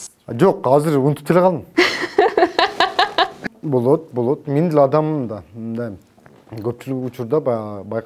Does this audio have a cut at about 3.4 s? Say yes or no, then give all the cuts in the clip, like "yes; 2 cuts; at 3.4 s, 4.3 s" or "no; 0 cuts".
yes; 1 cut; at 3.4 s